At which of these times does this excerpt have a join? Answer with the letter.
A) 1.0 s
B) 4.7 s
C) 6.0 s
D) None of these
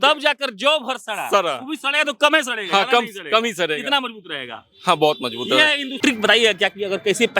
C